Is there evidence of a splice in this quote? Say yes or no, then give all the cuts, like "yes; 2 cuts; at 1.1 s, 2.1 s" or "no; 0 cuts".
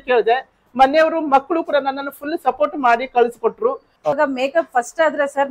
yes; 1 cut; at 3.9 s